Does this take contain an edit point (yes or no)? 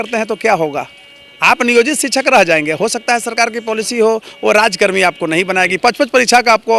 no